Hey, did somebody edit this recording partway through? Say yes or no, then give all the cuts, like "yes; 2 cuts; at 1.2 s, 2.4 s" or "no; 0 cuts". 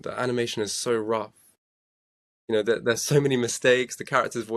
no; 0 cuts